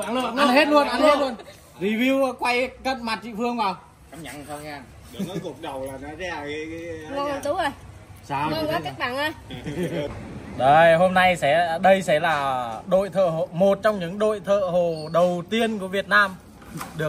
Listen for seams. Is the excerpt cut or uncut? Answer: cut